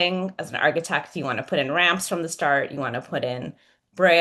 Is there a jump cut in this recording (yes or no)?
no